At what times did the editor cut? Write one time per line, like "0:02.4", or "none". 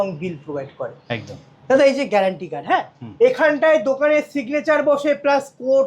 none